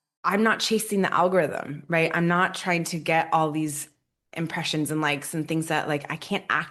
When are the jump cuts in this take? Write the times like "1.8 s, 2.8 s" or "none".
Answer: none